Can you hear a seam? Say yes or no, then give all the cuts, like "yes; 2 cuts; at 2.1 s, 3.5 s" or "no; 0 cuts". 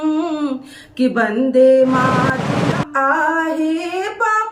yes; 1 cut; at 2.5 s